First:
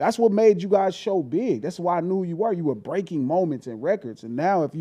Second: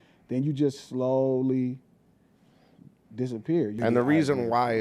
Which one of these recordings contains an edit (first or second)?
second